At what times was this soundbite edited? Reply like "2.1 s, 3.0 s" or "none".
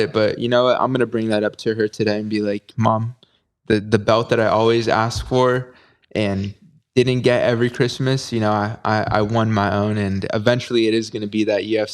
none